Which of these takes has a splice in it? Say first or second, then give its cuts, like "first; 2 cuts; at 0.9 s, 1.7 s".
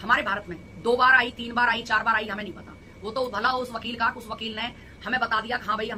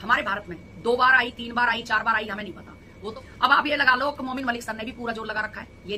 second; 1 cut; at 3.0 s